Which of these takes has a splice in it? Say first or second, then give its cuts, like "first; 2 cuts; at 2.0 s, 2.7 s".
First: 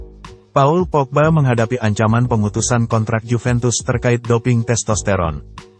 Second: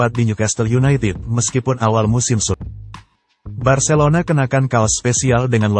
second; 1 cut; at 2.6 s